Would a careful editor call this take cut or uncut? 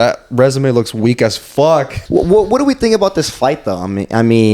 cut